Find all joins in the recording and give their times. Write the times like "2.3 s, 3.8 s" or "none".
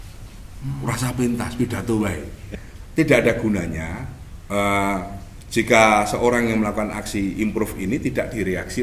2.4 s